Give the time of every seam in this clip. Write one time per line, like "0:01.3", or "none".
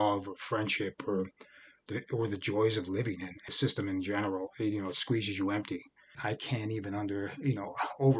0:03.5
0:06.2